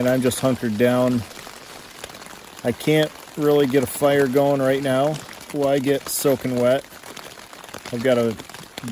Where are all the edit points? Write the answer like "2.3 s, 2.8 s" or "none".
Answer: 5.3 s, 7.7 s